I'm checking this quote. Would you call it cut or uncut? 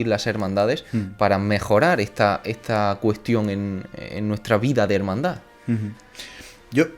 uncut